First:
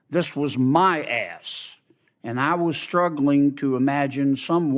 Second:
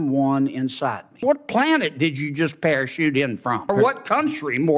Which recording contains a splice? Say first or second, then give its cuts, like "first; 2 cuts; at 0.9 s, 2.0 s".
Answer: second; 2 cuts; at 1.2 s, 3.7 s